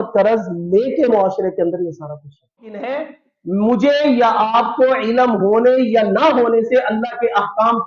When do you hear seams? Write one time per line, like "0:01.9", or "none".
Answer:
0:02.9